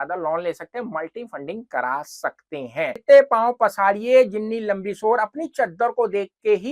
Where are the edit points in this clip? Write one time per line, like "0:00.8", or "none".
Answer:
0:03.0